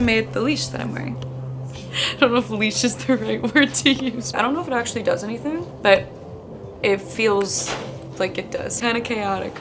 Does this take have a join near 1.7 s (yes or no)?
yes